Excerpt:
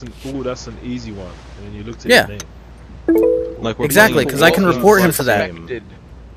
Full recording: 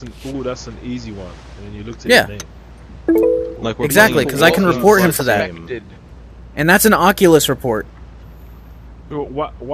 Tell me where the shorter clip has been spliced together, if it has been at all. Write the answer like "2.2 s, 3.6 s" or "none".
none

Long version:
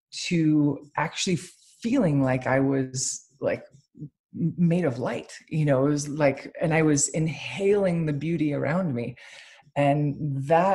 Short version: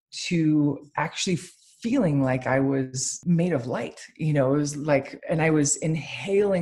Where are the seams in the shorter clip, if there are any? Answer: 3.2 s

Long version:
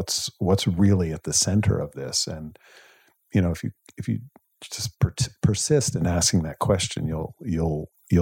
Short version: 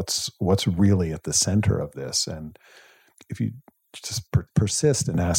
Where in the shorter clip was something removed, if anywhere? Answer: 3.2 s, 4.5 s

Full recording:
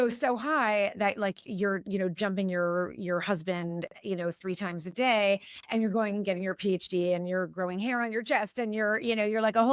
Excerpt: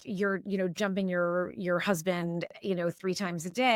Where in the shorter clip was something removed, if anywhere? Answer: none

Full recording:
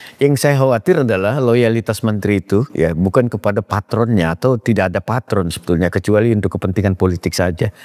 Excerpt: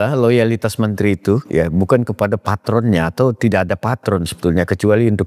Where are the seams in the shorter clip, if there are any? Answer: none

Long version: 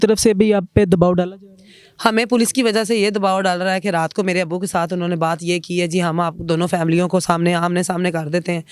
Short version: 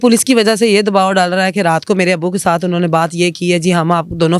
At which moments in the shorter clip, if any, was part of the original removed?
none

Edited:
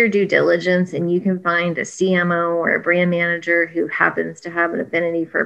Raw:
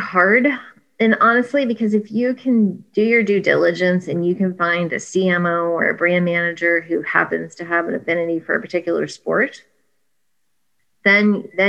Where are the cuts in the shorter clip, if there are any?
none

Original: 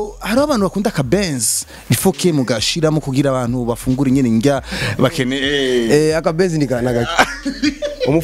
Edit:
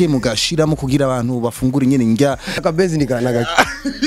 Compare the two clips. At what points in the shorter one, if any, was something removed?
2.6 s

